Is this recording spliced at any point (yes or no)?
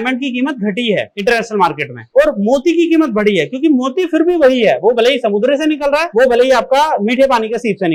no